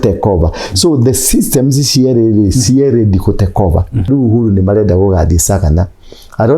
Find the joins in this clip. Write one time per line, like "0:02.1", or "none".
0:04.1